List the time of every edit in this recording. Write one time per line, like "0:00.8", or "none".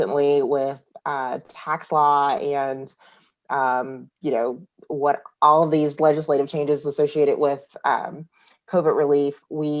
none